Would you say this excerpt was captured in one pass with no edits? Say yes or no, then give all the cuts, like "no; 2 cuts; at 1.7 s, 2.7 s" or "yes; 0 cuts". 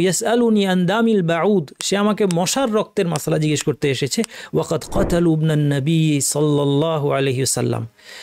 yes; 0 cuts